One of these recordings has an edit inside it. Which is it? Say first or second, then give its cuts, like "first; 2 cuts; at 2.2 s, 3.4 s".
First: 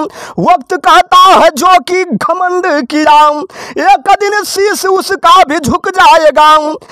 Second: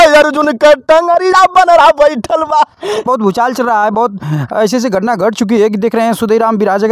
second; 1 cut; at 3.0 s